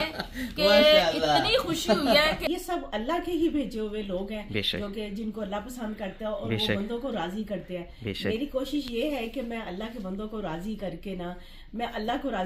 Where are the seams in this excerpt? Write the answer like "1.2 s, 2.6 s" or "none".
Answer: 2.4 s